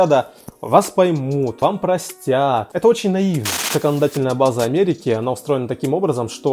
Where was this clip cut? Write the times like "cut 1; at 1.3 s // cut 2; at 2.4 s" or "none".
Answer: cut 1; at 1.6 s // cut 2; at 2.7 s // cut 3; at 3.7 s

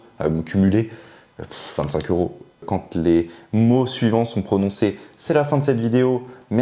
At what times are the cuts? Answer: cut 1; at 2.6 s

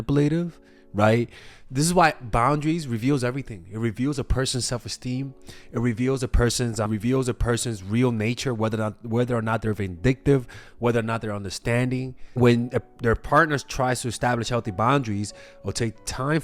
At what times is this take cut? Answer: cut 1; at 6.9 s // cut 2; at 12.2 s

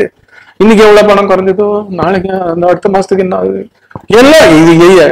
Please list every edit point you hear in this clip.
none

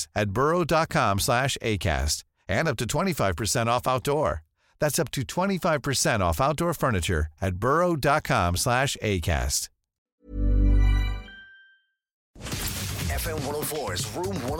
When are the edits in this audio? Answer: cut 1; at 12.4 s

